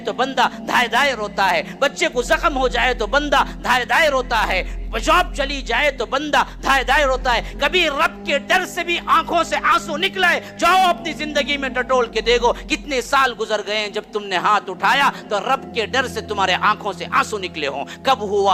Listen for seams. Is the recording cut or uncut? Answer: uncut